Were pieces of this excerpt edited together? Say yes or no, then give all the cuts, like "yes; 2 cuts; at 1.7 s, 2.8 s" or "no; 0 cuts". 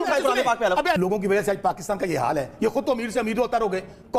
yes; 1 cut; at 1.0 s